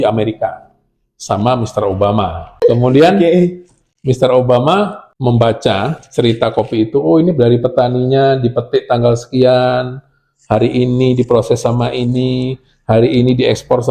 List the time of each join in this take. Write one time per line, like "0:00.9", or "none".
0:02.4
0:05.0